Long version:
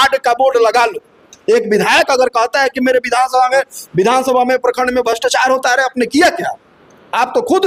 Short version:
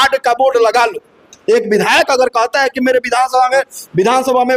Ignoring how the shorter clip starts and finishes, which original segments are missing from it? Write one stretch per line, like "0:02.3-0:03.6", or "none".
none